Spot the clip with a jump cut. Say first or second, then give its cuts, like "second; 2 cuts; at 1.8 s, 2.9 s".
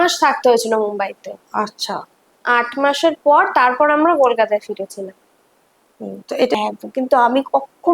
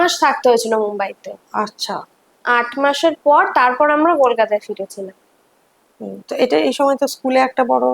first; 1 cut; at 6.6 s